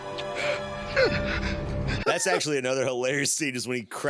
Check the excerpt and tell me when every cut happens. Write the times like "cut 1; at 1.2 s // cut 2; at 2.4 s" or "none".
cut 1; at 2.0 s